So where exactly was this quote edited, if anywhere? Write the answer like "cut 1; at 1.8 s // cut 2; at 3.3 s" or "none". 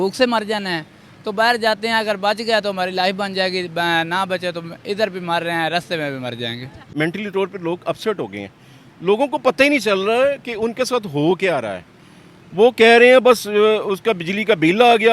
cut 1; at 6.9 s